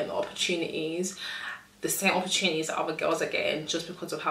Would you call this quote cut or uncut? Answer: uncut